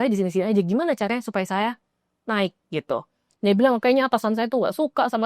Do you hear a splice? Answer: yes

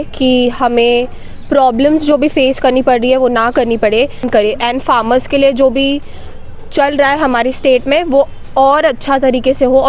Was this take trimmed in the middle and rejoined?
yes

